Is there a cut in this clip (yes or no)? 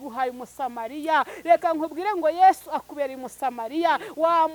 no